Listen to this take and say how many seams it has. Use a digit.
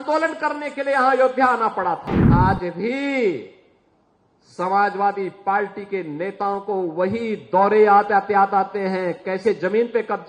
1